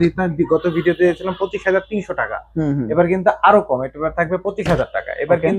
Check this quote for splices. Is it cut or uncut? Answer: uncut